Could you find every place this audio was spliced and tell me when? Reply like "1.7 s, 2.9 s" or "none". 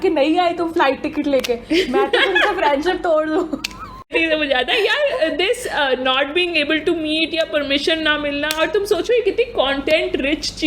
4.1 s